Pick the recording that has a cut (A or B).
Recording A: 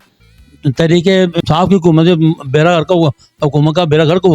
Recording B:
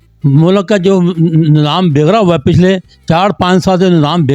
A